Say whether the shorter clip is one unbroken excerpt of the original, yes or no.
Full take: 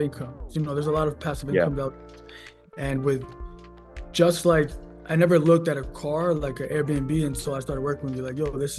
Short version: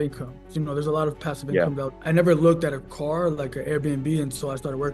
no